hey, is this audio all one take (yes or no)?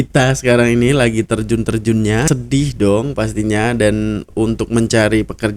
no